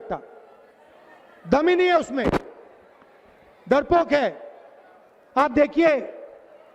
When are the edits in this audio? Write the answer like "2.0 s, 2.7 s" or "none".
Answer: none